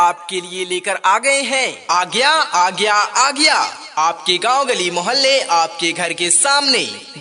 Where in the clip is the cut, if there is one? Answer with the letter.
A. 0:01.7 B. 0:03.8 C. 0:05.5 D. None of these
A